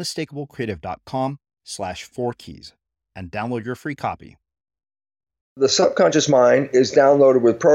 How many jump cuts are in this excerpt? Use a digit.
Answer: 1